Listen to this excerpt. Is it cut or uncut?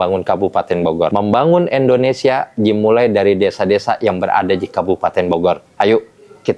cut